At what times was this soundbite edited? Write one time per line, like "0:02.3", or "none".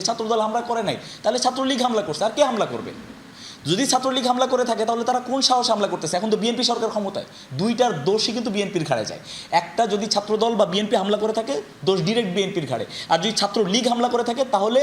none